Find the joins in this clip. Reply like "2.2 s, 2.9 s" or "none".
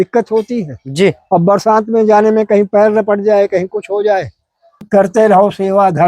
4.8 s